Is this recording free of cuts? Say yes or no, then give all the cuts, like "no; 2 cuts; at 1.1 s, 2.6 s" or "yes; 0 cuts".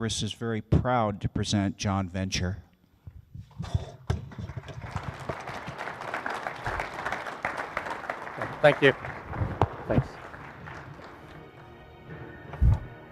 no; 1 cut; at 1.9 s